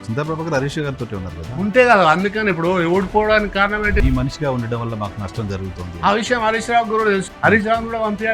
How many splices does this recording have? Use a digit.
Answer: 2